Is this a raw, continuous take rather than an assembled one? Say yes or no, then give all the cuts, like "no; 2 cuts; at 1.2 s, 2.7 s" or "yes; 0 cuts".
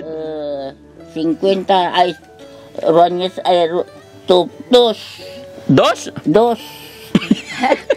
yes; 0 cuts